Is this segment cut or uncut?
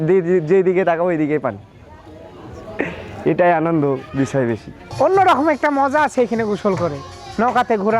uncut